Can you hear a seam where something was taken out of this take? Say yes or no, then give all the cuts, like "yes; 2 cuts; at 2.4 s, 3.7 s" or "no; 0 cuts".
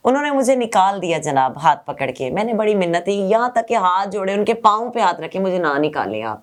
no; 0 cuts